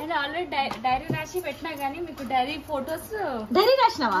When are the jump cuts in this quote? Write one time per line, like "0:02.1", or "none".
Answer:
none